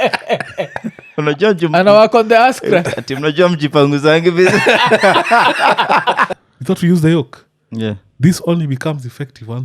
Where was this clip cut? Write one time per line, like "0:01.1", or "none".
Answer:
0:06.3